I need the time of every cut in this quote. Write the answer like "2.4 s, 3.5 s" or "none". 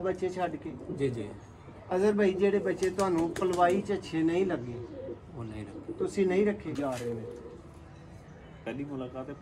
6.8 s